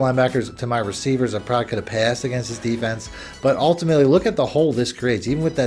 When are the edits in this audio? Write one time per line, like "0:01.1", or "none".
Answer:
none